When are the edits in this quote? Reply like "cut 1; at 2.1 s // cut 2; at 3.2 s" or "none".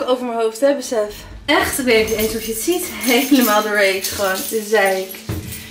none